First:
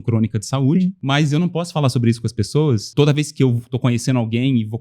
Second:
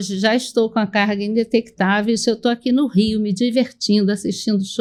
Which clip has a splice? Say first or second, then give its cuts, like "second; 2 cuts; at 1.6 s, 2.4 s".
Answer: first; 2 cuts; at 1.0 s, 2.9 s